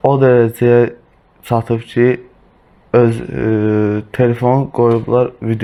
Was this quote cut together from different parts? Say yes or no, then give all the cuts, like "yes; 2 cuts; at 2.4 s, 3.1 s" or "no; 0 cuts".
no; 0 cuts